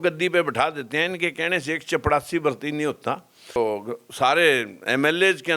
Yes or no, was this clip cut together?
yes